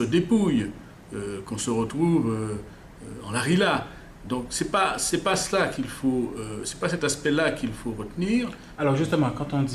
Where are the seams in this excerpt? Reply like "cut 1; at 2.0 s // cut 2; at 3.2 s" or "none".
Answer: cut 1; at 6.1 s